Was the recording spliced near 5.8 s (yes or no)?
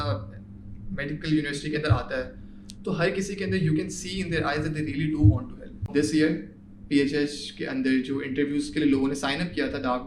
yes